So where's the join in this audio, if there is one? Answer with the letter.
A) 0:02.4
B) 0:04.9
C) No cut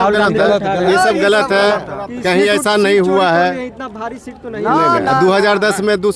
C